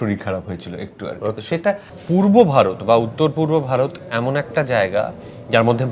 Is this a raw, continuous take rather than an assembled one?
no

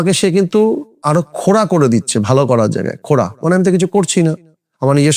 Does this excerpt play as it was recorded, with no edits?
no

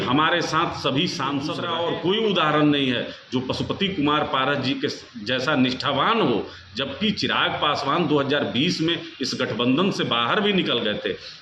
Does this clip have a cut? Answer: yes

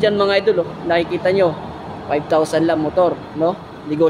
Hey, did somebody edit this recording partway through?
no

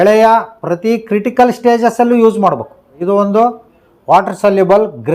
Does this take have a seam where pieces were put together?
yes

